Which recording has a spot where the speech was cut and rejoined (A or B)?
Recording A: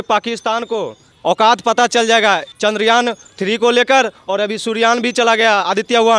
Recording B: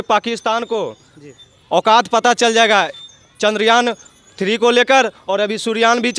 A